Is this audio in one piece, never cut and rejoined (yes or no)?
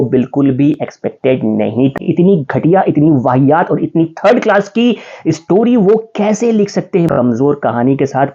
no